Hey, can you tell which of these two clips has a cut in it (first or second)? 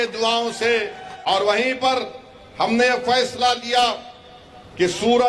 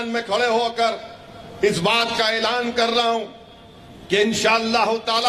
first